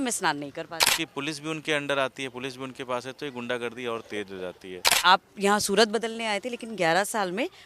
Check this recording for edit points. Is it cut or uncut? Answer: cut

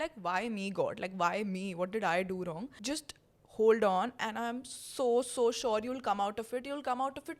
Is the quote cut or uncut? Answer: uncut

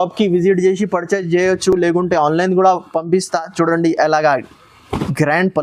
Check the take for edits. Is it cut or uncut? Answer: uncut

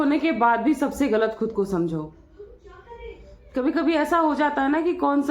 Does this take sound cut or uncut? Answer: uncut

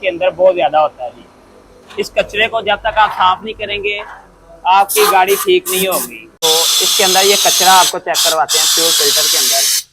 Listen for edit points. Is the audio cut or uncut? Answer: cut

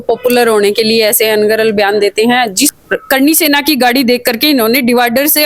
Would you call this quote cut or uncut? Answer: cut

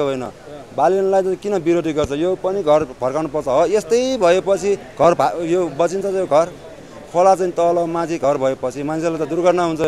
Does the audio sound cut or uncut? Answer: uncut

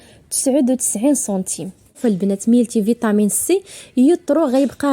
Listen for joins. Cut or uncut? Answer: cut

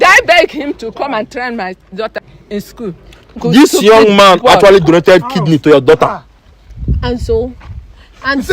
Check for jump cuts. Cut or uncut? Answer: cut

